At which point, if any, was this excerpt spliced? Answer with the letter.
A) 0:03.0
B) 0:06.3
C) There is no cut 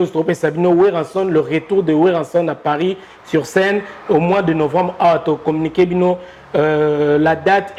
C